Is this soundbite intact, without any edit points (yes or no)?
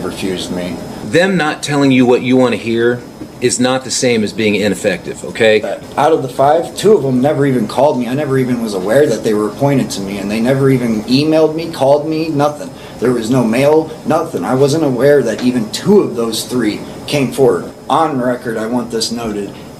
no